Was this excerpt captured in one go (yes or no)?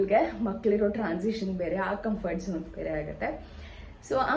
yes